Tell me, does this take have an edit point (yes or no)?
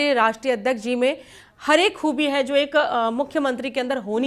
no